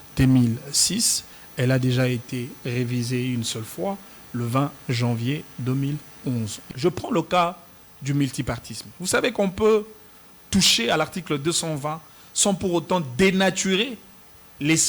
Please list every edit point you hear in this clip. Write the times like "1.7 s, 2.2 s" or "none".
6.6 s